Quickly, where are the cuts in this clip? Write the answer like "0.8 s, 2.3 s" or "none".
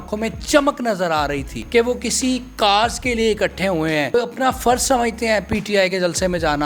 1.5 s, 4.1 s

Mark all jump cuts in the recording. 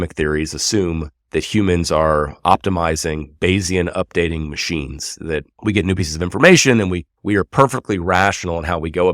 1.1 s, 5.5 s, 7.1 s

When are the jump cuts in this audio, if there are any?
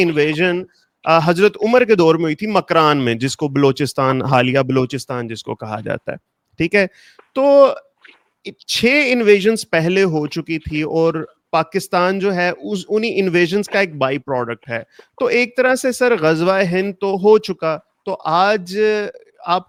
none

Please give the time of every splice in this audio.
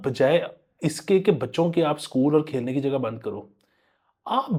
none

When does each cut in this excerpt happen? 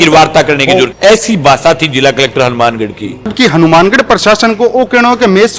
0.9 s, 3.3 s

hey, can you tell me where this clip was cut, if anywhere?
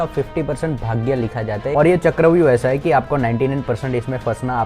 1.7 s

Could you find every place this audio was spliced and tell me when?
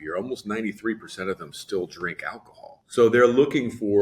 2.8 s

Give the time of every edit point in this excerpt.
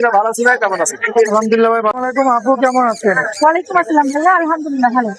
1.9 s

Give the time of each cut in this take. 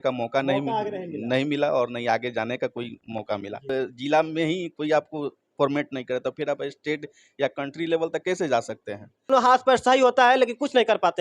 3.6 s, 9.3 s

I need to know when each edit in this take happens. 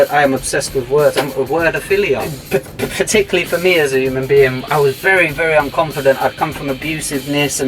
2.3 s

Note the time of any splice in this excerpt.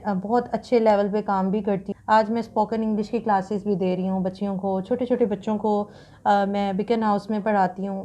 1.9 s

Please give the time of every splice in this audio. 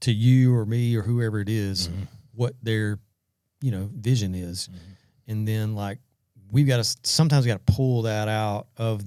none

